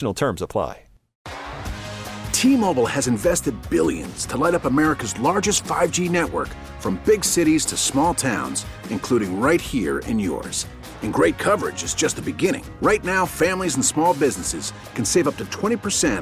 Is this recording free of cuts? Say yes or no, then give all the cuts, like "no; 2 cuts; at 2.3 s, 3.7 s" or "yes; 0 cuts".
no; 1 cut; at 1.1 s